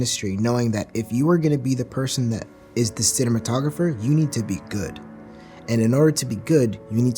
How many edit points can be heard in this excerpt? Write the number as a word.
zero